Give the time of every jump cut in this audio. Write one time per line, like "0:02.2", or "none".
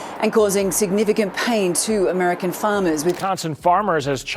0:03.2